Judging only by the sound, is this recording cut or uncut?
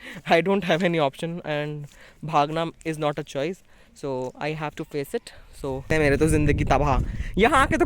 cut